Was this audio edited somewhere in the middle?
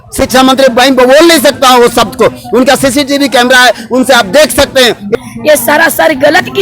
yes; 1 cut; at 5.1 s

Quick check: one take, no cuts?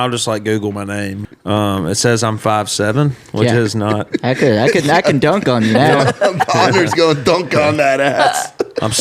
no; 1 cut; at 1.2 s

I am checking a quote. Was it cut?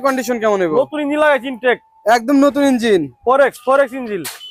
no; 0 cuts

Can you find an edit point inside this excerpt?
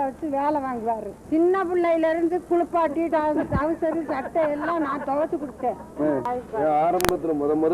yes; 1 cut; at 1.1 s

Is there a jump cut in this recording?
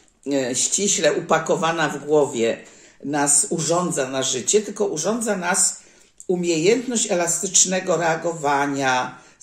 no; 0 cuts

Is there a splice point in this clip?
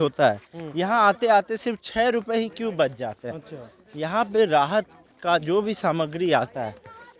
no; 0 cuts

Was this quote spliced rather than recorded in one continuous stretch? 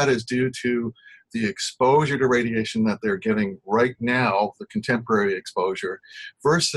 no; 0 cuts

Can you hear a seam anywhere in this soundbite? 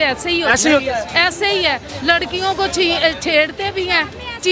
no; 0 cuts

